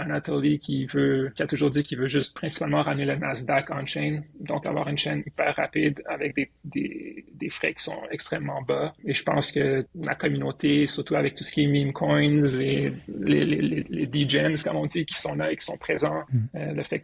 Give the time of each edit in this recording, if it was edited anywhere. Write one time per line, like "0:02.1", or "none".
0:01.3
0:02.4
0:09.0
0:10.0
0:16.3